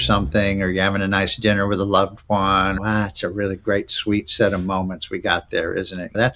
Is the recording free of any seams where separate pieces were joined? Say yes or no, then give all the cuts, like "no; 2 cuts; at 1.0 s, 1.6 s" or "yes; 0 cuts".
no; 1 cut; at 2.8 s